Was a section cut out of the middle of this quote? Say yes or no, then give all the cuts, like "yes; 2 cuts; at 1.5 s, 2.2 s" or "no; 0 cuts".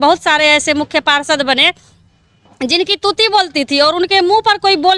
no; 0 cuts